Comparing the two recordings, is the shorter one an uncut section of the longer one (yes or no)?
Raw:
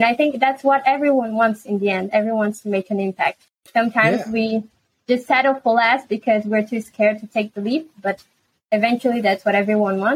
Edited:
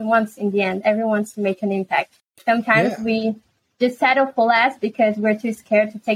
yes